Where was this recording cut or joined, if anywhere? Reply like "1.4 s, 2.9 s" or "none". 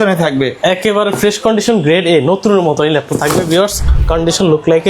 3.9 s